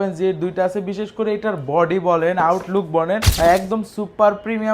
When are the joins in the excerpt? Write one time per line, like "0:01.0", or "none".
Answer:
0:03.3